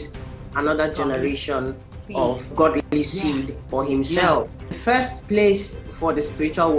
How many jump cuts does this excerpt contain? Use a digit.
2